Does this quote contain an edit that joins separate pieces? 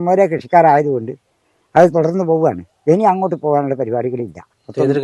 no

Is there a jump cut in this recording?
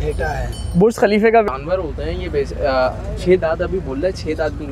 yes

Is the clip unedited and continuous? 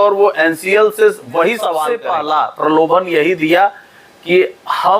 no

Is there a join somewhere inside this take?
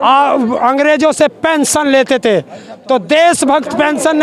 no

